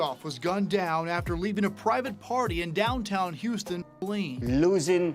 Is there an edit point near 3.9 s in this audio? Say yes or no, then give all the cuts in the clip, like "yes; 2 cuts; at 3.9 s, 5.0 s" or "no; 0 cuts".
yes; 1 cut; at 3.9 s